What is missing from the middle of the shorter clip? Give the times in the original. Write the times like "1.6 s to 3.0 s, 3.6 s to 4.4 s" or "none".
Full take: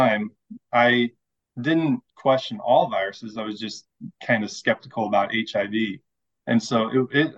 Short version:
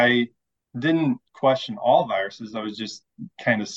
none